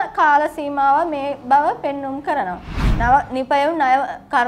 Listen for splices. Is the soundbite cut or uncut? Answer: cut